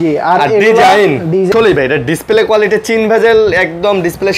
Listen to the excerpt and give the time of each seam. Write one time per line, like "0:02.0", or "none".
0:01.5